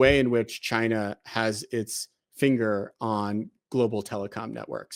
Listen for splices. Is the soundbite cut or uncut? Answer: uncut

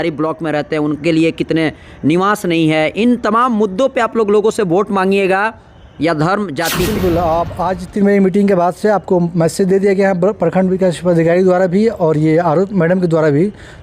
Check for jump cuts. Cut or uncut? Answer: cut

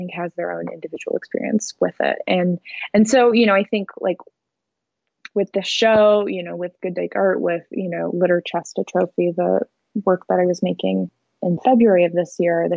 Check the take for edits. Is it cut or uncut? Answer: uncut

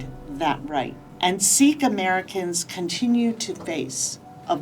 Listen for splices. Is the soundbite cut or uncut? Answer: cut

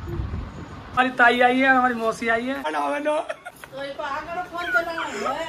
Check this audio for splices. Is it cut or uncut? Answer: cut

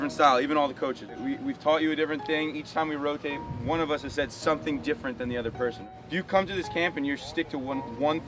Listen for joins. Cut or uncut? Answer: cut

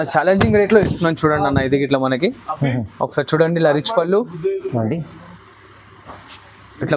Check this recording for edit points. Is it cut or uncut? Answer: uncut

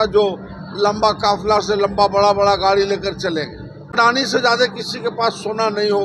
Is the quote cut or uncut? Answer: cut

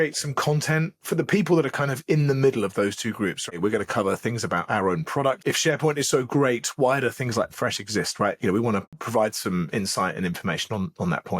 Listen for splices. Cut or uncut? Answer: cut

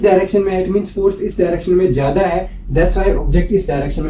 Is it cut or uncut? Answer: uncut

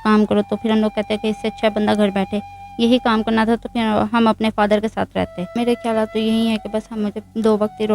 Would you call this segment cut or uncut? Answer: cut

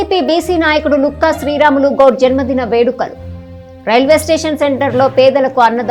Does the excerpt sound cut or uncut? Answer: uncut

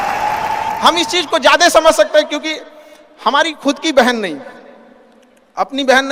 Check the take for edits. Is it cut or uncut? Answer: uncut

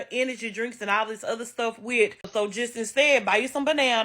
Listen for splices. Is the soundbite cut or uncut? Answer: cut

